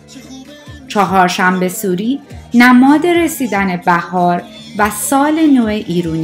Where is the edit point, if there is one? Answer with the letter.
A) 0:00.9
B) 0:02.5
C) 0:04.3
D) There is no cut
A